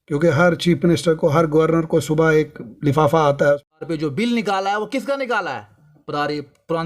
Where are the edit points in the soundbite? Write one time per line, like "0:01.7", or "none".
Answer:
0:03.7